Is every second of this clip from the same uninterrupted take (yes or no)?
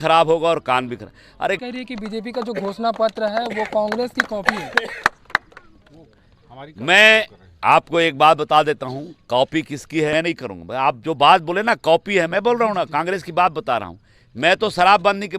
no